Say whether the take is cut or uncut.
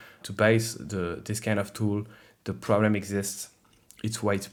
uncut